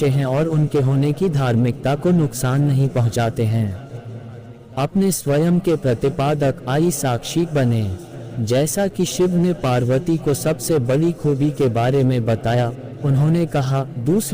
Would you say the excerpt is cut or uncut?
cut